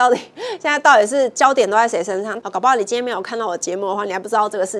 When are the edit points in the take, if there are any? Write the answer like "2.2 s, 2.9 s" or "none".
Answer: 2.4 s